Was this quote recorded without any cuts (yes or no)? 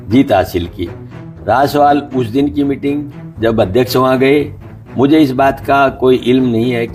yes